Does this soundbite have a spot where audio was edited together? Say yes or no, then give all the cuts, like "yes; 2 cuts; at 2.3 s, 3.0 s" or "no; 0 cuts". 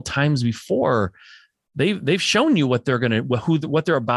no; 0 cuts